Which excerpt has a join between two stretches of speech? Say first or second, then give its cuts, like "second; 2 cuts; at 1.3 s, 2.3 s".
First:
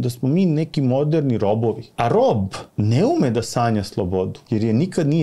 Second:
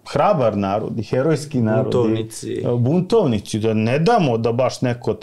first; 3 cuts; at 1.9 s, 2.6 s, 4.4 s